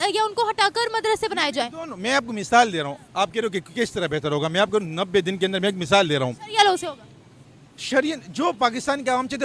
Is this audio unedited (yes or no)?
yes